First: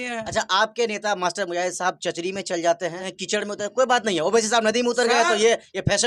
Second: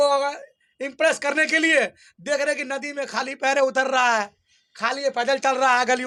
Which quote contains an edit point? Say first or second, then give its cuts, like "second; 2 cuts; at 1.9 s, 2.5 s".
first; 1 cut; at 3.1 s